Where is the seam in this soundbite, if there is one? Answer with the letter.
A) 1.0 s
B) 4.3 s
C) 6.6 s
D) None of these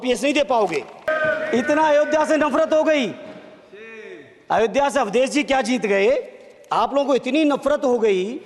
A